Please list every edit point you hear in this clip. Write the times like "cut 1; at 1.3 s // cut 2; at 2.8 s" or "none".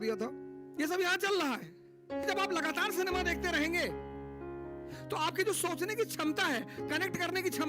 cut 1; at 2.2 s